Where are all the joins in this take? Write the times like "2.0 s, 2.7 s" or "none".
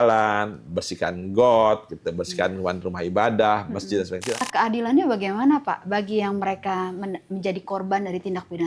4.4 s